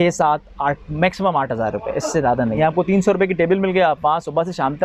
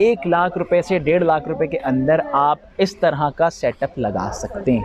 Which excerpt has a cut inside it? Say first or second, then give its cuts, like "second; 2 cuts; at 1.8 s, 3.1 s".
first; 1 cut; at 2.5 s